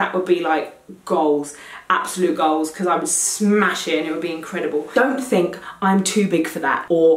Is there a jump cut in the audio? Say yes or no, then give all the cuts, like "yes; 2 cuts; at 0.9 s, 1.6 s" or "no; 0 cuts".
yes; 1 cut; at 4.9 s